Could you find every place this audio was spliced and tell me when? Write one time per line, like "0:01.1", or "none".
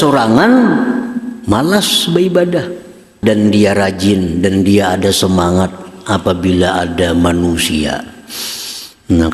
0:03.1